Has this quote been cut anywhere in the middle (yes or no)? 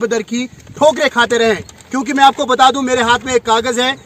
no